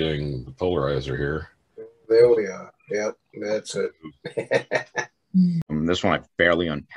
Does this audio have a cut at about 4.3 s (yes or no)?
no